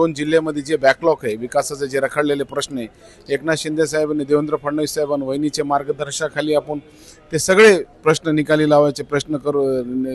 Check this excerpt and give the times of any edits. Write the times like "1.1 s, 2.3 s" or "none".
none